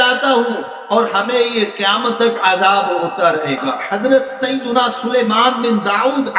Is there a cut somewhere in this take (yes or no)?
yes